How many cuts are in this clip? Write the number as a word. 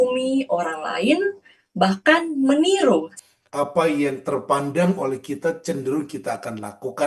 one